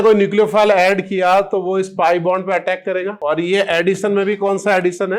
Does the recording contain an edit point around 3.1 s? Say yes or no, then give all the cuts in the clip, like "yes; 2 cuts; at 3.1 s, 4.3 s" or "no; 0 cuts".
yes; 1 cut; at 3.1 s